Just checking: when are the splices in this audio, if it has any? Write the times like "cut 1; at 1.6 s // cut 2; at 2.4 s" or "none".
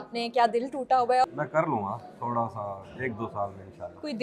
cut 1; at 1.2 s